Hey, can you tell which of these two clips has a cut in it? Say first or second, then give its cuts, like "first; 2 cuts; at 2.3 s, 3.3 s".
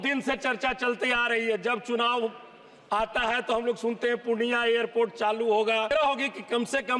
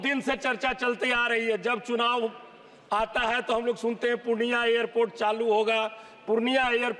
first; 1 cut; at 5.9 s